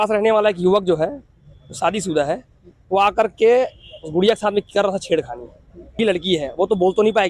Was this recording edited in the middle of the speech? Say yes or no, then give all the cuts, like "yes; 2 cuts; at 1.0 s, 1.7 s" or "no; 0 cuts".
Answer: yes; 1 cut; at 6.0 s